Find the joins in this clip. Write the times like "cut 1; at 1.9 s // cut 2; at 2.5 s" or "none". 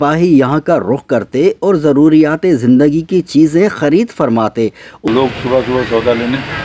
cut 1; at 5.1 s